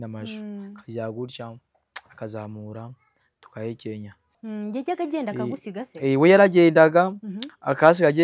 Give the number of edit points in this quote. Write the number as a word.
one